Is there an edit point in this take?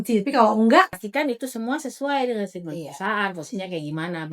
yes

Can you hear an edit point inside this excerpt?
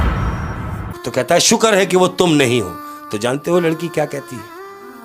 yes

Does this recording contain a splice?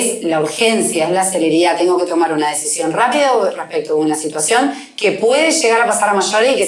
no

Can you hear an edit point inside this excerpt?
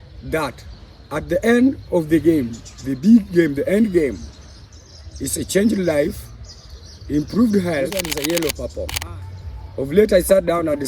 yes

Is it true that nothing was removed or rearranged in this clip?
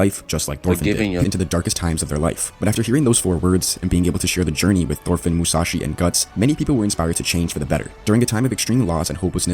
no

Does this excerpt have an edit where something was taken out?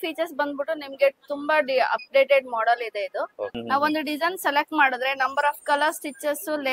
yes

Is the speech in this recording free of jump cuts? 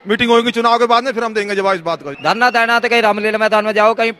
no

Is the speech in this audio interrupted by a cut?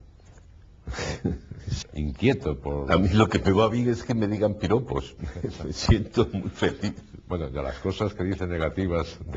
no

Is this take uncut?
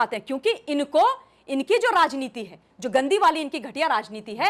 yes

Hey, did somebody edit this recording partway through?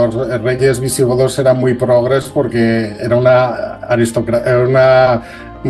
no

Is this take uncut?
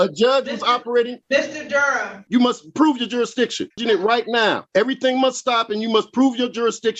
no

